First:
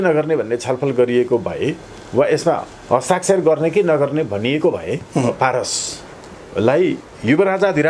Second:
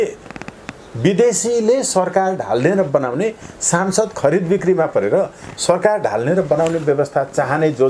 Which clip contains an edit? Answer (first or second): first